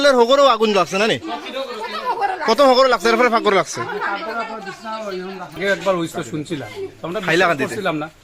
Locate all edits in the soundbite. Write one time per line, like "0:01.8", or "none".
0:05.5